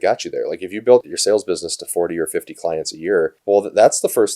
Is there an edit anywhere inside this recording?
yes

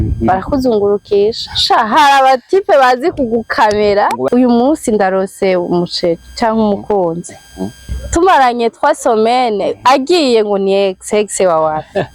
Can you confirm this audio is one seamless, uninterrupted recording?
no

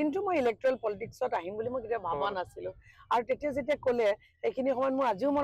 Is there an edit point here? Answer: no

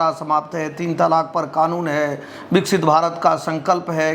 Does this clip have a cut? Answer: no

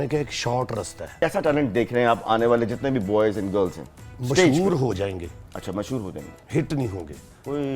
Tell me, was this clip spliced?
yes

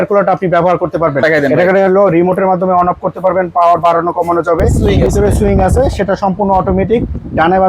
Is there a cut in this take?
yes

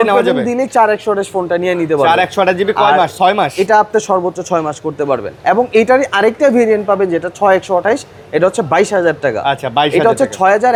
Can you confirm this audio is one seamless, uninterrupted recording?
yes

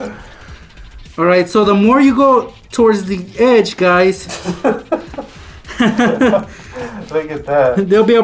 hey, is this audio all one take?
no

